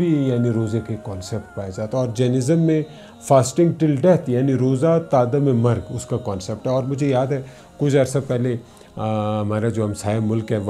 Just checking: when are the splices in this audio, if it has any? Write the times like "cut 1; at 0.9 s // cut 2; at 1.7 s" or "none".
none